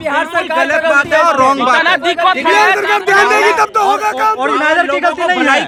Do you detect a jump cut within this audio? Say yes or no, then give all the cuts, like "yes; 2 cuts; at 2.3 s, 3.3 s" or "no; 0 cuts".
no; 0 cuts